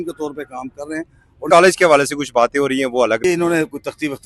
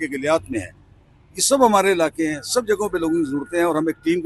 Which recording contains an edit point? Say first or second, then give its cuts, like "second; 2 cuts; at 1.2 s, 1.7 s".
first; 2 cuts; at 1.5 s, 3.2 s